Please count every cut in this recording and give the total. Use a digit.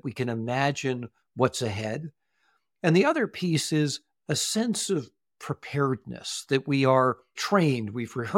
1